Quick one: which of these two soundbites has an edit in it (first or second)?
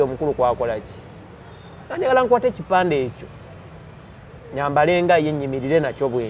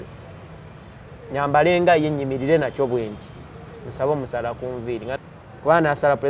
second